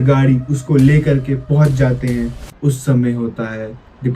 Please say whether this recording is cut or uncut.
cut